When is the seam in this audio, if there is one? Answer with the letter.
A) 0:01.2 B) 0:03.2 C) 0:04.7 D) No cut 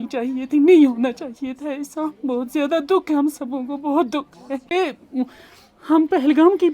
C